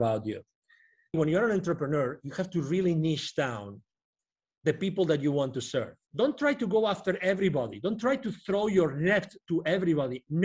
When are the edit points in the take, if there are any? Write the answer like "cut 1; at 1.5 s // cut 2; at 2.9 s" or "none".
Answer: cut 1; at 1.1 s // cut 2; at 6.0 s